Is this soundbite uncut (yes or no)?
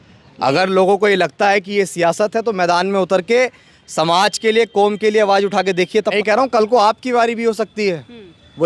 no